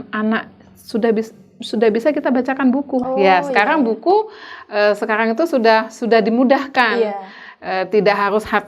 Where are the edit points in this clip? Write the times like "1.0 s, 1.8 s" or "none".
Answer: 3.0 s